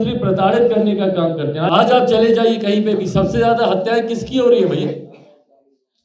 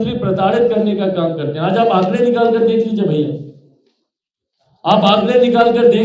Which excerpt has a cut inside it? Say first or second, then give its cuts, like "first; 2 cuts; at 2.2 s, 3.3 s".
first; 1 cut; at 1.6 s